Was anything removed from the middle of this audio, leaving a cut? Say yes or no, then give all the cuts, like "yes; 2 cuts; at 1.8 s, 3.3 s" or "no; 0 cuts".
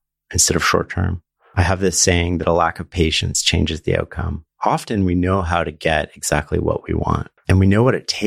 yes; 1 cut; at 7.3 s